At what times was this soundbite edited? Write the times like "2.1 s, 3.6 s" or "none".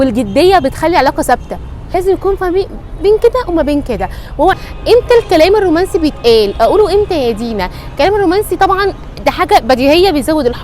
1.8 s, 4.6 s